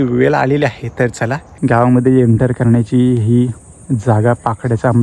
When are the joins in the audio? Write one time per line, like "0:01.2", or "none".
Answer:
0:01.4